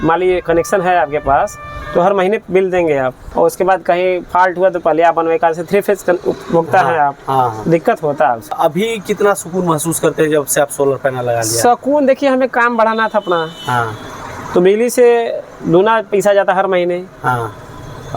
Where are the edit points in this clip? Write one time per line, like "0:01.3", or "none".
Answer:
0:03.2
0:08.5

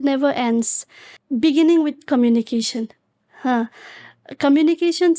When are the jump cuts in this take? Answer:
0:01.1

